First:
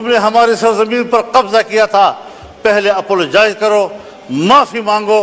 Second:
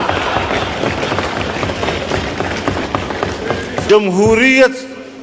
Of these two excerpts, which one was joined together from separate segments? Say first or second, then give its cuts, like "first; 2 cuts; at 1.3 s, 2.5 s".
second; 1 cut; at 3.7 s